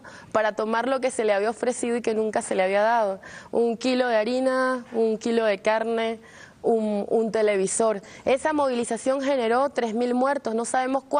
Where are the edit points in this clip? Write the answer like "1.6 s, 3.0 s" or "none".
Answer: 8.8 s